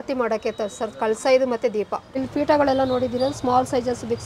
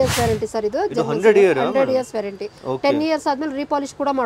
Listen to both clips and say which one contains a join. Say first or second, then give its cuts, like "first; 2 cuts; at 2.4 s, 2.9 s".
first; 1 cut; at 2.1 s